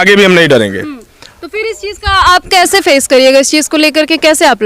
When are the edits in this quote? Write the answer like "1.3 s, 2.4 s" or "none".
none